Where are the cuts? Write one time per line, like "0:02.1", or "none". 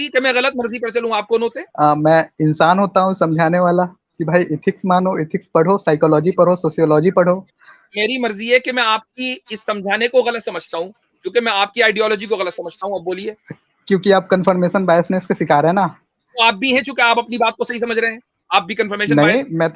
0:01.6